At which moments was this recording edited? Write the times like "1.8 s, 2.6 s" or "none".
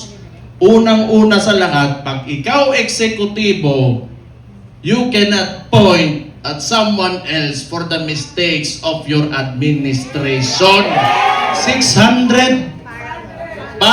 11.6 s